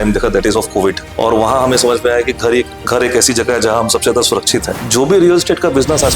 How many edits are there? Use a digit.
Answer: 2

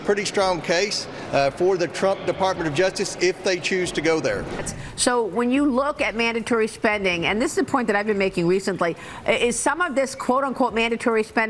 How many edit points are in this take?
1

